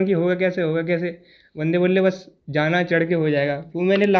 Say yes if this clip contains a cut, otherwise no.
no